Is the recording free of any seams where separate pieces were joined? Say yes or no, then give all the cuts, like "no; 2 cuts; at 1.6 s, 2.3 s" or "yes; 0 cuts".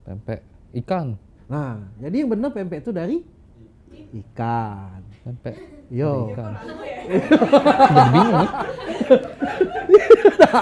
yes; 0 cuts